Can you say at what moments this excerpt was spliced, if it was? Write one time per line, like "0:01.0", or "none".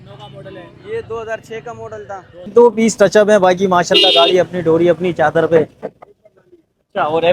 0:02.5